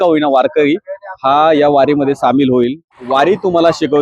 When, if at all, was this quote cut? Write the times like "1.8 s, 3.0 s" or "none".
2.9 s